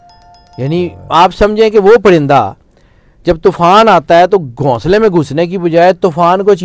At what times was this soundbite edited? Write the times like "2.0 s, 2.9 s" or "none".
none